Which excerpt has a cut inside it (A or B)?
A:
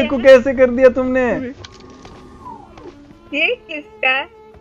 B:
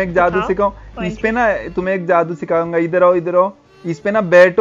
A